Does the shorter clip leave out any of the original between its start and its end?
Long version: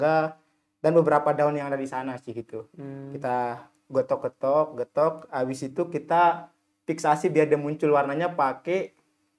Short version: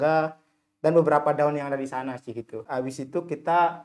yes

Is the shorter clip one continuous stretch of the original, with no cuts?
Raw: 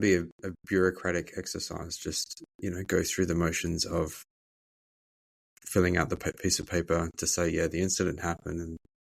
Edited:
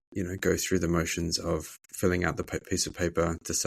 no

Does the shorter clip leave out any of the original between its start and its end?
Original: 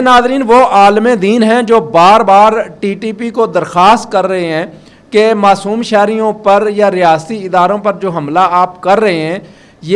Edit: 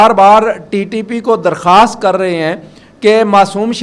no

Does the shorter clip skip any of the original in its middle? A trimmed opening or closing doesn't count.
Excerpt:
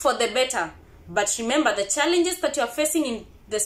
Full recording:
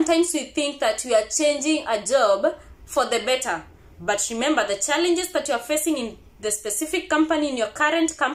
no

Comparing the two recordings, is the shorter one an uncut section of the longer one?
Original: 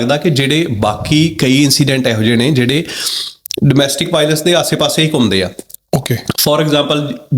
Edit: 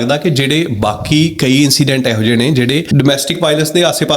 no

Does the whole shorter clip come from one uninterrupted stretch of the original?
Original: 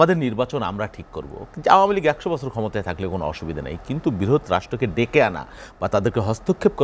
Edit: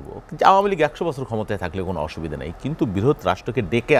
yes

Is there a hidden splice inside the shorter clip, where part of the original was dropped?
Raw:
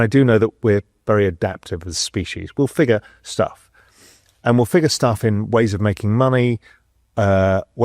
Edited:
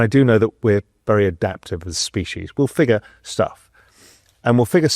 no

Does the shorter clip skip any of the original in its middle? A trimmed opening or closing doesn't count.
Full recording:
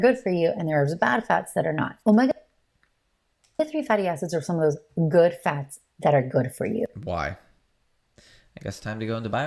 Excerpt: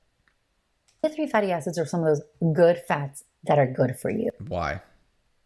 no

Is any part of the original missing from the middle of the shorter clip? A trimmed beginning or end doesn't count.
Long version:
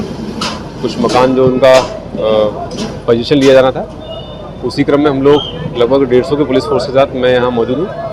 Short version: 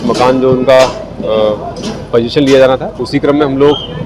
yes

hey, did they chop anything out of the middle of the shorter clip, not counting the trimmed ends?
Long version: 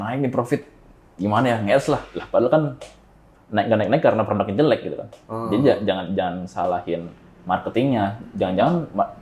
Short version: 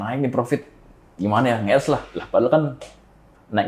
no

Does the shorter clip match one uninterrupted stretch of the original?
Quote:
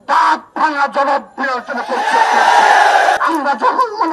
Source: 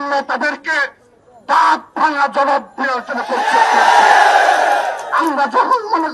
no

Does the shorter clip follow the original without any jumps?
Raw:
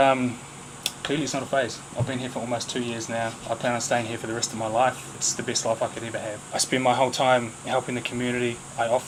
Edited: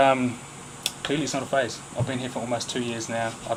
yes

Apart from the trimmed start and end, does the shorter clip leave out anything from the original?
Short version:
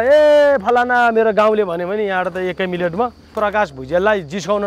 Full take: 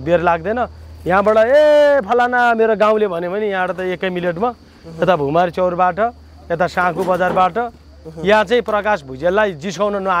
yes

